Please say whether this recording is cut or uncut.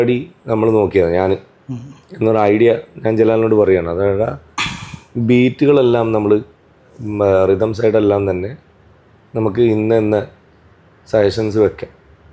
uncut